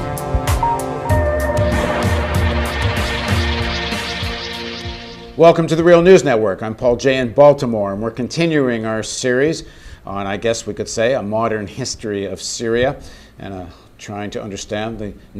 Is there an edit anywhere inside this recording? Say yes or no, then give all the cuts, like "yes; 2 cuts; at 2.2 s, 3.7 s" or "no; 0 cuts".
no; 0 cuts